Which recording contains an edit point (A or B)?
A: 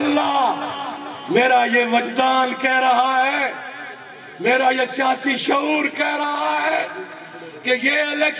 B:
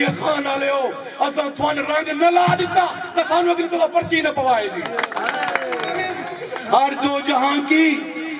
B